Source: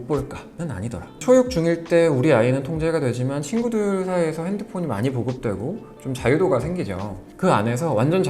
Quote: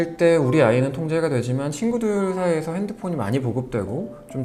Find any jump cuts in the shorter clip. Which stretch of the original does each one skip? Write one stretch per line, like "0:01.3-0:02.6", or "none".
none